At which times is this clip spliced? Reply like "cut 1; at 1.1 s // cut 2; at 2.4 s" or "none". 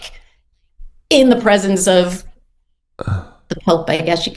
none